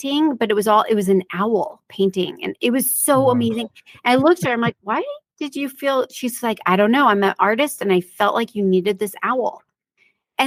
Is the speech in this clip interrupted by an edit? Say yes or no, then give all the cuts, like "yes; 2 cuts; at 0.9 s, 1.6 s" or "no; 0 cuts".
no; 0 cuts